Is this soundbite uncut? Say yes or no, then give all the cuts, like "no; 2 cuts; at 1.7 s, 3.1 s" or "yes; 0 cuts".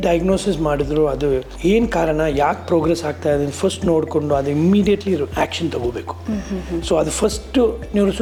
yes; 0 cuts